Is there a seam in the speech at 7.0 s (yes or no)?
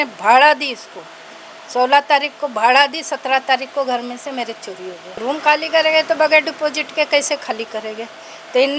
no